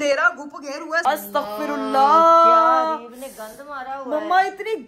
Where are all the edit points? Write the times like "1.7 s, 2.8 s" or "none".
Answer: 1.0 s